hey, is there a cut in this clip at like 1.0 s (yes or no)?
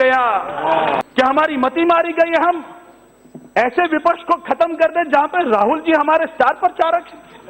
yes